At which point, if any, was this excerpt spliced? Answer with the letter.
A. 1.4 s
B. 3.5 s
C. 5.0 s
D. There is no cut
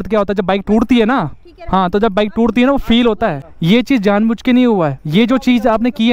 B